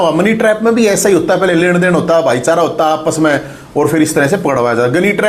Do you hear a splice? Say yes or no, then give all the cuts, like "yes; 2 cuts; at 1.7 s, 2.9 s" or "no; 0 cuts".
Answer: no; 0 cuts